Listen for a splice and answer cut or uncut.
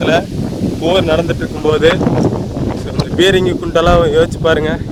uncut